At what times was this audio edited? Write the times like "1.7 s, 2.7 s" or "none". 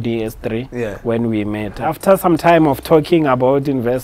1.8 s